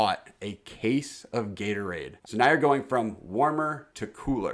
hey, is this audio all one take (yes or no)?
no